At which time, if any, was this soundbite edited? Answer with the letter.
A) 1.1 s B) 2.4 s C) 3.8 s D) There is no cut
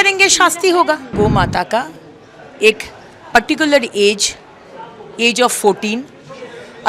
A